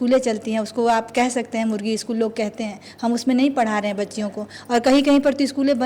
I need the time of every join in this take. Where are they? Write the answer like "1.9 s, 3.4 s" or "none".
none